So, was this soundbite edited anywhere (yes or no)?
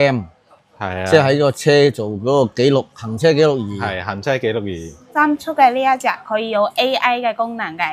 yes